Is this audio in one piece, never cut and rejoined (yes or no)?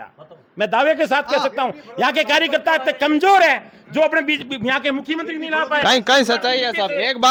yes